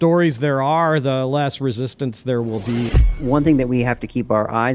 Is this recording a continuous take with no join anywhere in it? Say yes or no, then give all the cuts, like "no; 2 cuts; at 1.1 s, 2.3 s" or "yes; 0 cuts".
no; 1 cut; at 3.2 s